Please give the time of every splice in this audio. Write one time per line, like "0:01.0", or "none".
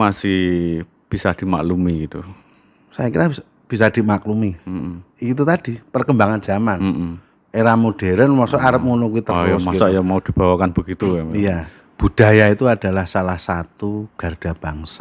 0:11.7